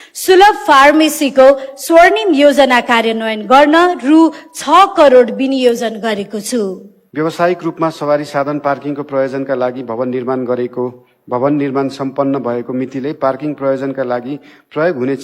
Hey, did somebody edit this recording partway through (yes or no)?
yes